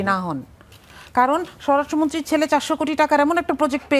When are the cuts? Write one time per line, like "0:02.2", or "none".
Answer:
none